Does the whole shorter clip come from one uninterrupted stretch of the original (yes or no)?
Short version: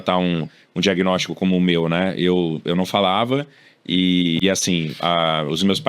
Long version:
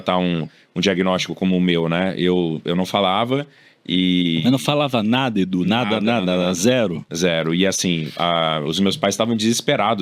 no